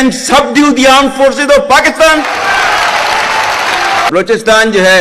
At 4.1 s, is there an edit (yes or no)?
yes